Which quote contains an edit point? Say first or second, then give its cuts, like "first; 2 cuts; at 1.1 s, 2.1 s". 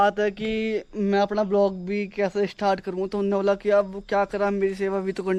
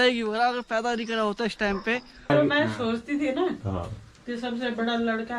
second; 1 cut; at 2.3 s